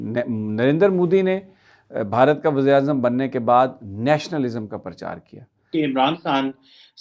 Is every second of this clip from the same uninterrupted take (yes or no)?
no